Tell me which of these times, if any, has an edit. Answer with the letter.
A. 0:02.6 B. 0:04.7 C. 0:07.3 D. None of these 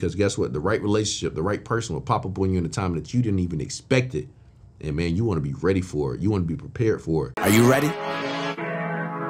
C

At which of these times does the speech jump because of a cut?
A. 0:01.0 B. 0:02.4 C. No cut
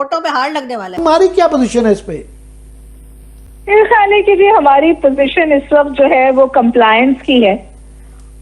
A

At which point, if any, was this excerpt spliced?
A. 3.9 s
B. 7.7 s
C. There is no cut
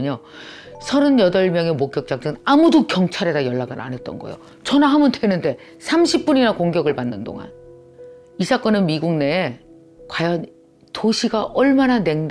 C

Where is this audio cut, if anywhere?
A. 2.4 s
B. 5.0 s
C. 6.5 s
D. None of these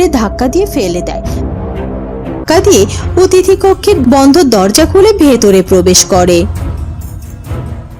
A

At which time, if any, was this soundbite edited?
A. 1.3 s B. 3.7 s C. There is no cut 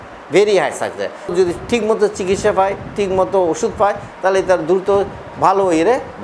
A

